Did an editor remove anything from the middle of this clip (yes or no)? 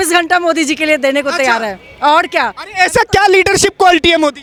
no